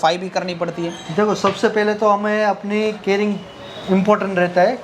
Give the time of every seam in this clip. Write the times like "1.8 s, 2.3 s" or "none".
none